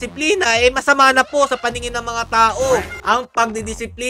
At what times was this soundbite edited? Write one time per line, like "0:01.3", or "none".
0:02.9